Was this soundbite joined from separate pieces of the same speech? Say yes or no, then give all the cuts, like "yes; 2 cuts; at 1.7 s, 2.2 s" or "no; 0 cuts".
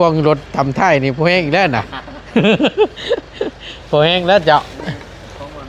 no; 0 cuts